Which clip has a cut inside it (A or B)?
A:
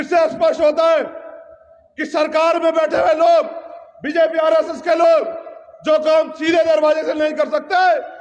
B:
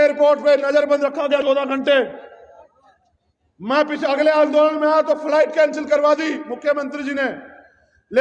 B